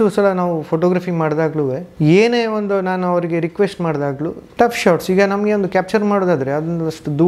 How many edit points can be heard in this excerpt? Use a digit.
2